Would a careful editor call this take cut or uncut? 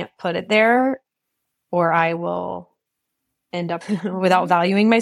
cut